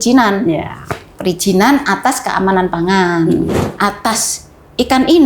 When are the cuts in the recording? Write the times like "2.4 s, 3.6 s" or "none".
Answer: 3.5 s